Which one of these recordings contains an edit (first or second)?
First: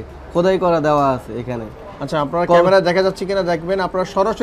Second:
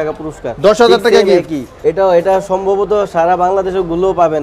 second